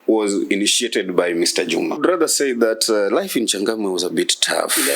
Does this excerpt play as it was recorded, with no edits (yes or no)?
no